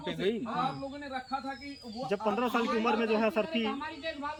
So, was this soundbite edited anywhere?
no; 0 cuts

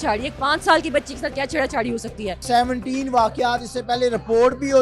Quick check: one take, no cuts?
no; 1 cut; at 2.4 s

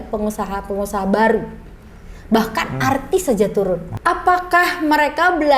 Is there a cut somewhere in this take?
yes; 1 cut; at 3.9 s

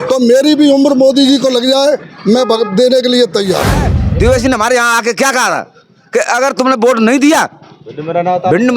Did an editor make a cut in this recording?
yes; 1 cut; at 4.0 s

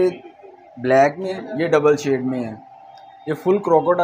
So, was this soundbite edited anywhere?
yes; 1 cut; at 1.3 s

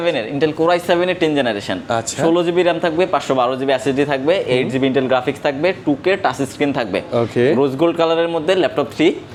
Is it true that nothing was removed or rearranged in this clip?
yes; 0 cuts

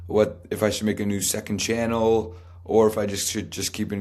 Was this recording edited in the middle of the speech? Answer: no; 0 cuts

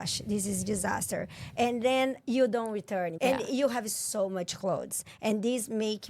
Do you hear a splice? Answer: yes; 1 cut; at 3.1 s

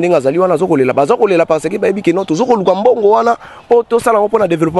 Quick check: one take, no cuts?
yes; 0 cuts

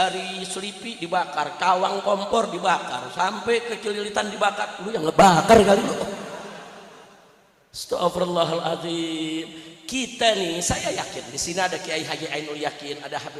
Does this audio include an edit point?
no; 0 cuts

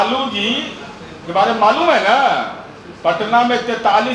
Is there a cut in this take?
no; 0 cuts

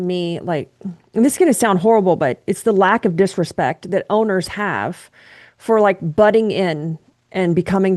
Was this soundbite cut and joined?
no; 0 cuts

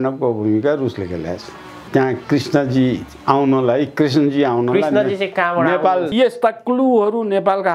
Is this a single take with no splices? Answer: no; 2 cuts; at 1.9 s, 6.1 s

